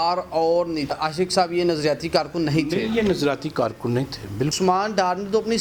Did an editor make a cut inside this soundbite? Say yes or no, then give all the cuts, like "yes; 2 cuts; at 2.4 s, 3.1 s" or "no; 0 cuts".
yes; 2 cuts; at 0.9 s, 4.5 s